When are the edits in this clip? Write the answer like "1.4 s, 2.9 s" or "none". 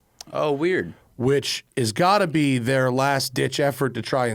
none